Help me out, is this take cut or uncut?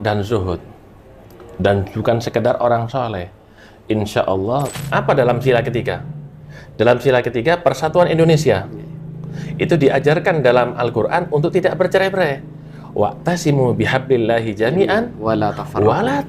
cut